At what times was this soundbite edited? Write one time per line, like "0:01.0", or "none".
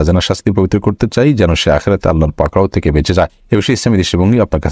0:03.4